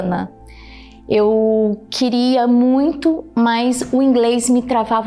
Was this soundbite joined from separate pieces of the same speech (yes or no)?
no